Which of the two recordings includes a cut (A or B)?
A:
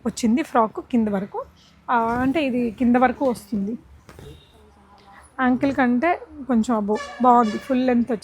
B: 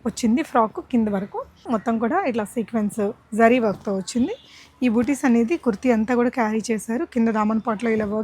B